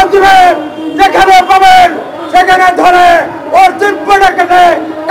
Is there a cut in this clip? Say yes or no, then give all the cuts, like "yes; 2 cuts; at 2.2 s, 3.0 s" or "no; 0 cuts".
no; 0 cuts